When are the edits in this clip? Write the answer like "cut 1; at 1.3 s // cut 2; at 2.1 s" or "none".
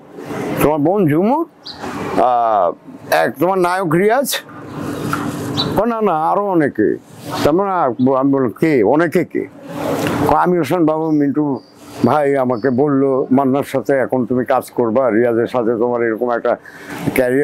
none